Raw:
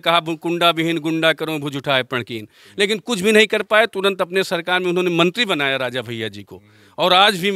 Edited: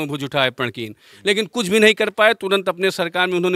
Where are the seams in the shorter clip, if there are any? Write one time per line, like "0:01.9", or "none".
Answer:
none